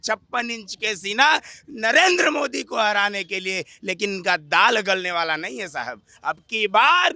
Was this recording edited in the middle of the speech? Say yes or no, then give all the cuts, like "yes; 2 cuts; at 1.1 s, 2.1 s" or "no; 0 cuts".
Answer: no; 0 cuts